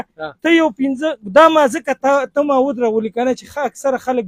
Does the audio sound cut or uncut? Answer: uncut